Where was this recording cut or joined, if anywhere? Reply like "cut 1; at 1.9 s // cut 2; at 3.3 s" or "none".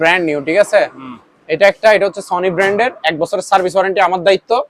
none

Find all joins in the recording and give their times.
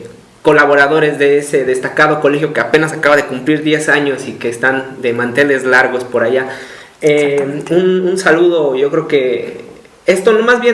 cut 1; at 7.7 s

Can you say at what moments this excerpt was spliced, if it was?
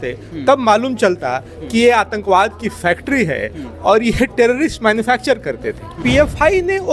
cut 1; at 6.0 s

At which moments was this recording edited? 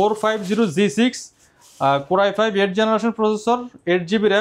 none

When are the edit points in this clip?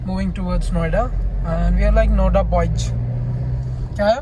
none

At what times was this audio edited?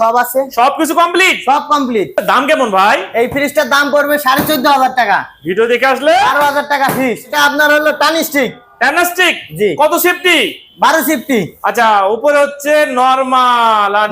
cut 1; at 7.3 s

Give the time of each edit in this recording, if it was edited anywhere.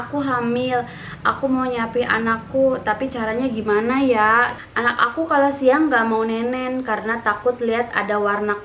cut 1; at 4.6 s

